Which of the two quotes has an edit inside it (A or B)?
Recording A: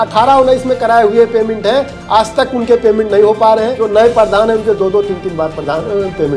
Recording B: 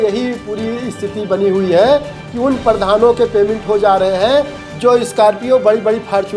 A